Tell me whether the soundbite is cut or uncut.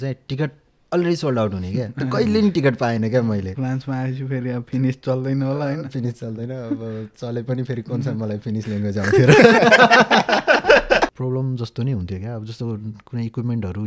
cut